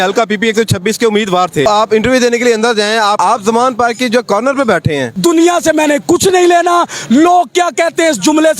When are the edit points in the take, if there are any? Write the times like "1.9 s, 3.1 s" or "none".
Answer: 1.7 s, 3.2 s, 5.1 s

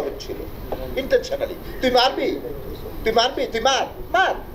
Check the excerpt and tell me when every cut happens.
none

